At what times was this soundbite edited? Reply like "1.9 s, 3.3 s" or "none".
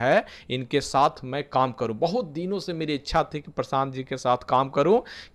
none